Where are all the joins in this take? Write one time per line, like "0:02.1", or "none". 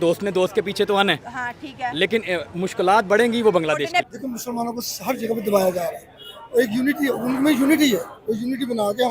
0:04.1